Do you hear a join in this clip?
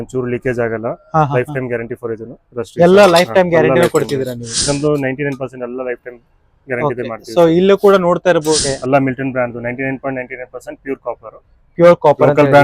yes; 2 cuts; at 4.6 s, 8.6 s

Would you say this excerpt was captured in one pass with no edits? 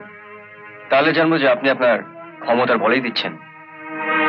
yes; 0 cuts

